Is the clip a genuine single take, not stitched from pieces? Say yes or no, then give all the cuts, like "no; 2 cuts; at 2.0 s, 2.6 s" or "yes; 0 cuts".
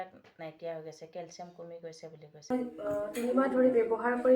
no; 1 cut; at 2.5 s